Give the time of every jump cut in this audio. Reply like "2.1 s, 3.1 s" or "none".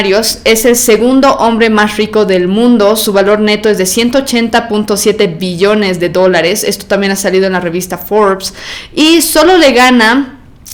none